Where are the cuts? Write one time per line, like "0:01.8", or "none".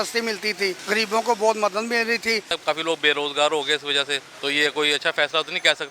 0:00.8
0:02.5
0:04.2